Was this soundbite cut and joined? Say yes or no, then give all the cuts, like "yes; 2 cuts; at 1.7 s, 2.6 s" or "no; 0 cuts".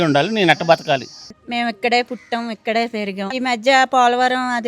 yes; 2 cuts; at 1.2 s, 3.3 s